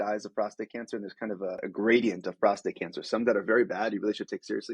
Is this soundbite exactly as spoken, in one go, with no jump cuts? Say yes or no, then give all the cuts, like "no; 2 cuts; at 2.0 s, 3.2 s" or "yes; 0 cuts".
no; 1 cut; at 1.6 s